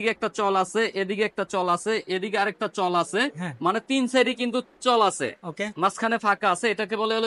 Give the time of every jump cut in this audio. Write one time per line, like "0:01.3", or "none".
none